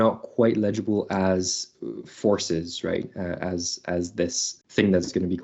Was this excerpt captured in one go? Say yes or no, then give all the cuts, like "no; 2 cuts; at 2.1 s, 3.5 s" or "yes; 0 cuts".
no; 1 cut; at 4.5 s